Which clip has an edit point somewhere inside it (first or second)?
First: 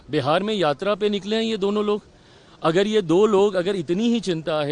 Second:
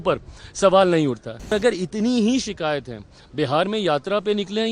second